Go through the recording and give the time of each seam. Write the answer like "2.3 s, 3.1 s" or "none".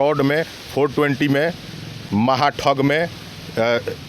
2.0 s

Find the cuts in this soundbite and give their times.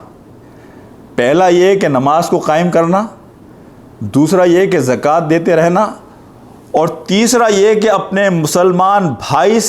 none

